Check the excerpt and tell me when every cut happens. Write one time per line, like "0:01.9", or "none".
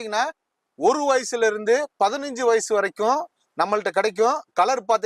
none